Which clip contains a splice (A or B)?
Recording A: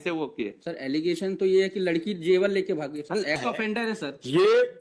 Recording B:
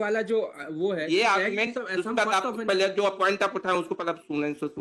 A